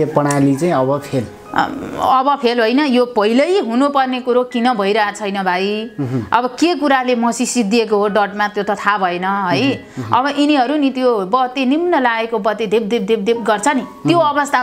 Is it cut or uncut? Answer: uncut